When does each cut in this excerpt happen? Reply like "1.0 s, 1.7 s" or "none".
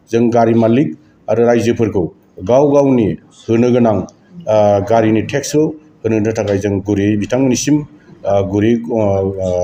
none